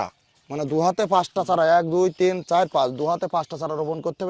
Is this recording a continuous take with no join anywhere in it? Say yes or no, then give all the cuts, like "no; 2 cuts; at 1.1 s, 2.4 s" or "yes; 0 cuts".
yes; 0 cuts